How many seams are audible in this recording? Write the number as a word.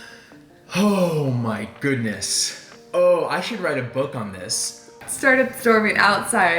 one